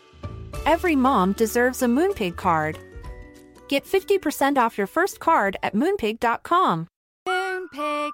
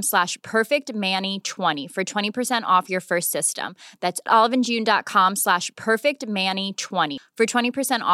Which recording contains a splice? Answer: second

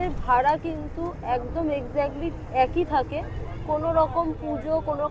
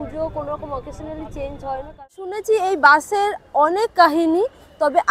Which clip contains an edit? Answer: second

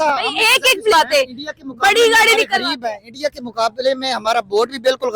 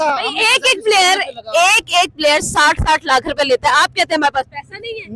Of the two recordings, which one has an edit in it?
first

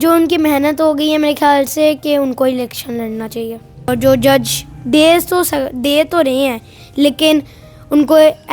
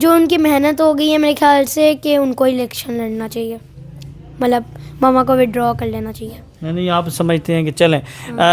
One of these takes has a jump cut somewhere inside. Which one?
first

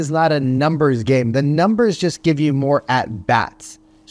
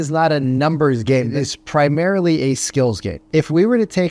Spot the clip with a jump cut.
second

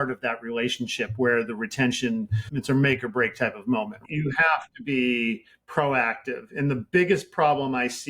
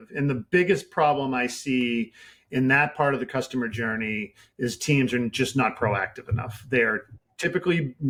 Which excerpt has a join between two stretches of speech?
first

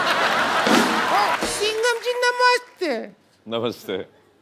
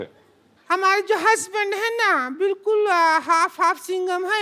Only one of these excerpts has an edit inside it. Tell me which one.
first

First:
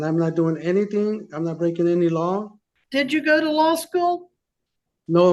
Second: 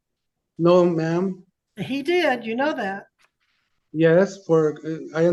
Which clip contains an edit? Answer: first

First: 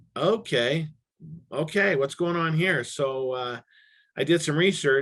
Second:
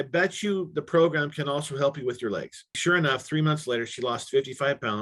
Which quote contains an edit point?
second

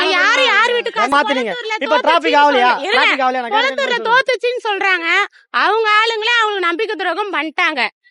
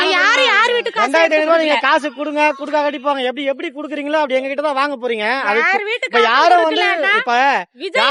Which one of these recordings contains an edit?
first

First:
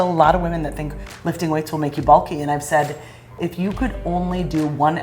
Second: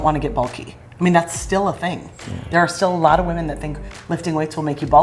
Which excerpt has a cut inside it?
first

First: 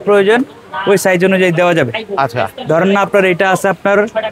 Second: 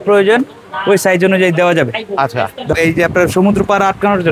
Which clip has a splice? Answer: second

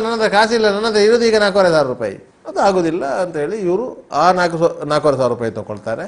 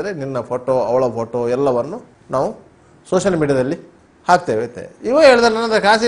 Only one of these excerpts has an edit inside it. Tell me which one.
first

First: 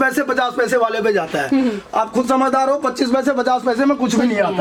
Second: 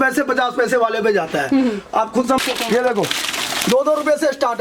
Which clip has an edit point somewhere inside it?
second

